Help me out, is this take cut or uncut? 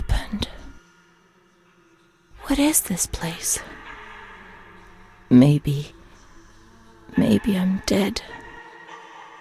cut